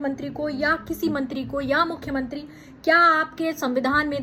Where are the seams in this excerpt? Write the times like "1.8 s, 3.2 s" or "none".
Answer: none